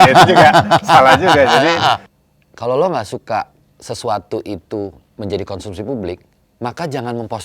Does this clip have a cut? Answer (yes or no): yes